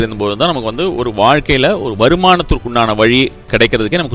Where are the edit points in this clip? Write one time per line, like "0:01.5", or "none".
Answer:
none